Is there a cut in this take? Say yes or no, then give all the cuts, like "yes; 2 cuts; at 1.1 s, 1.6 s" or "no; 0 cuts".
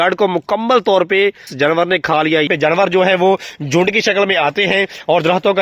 yes; 2 cuts; at 1.5 s, 2.5 s